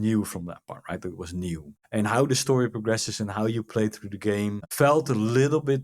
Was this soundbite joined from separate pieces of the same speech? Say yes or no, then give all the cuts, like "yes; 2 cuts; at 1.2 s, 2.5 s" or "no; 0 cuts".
yes; 2 cuts; at 1.7 s, 4.6 s